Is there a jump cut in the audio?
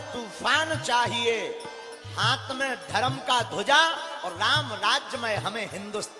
no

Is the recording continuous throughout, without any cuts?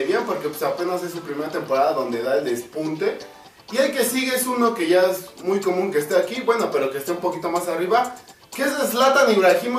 yes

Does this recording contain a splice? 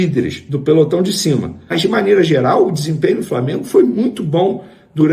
yes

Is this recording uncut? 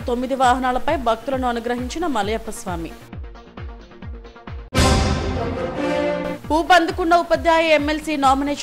yes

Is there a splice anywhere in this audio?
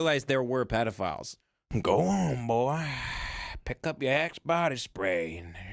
yes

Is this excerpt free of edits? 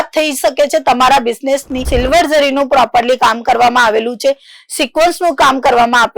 no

